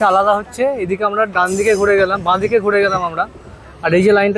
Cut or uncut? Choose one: uncut